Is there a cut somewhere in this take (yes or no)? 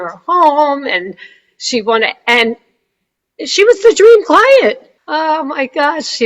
yes